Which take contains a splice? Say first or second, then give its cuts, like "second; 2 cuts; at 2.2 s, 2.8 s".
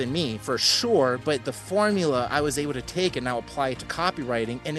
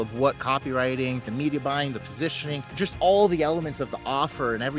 second; 2 cuts; at 1.3 s, 2.9 s